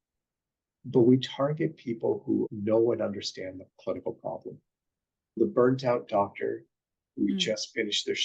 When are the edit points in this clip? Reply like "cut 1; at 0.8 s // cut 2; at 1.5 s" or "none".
cut 1; at 2.5 s // cut 2; at 5.4 s